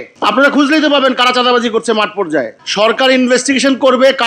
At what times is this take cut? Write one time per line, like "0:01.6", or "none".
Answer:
0:02.6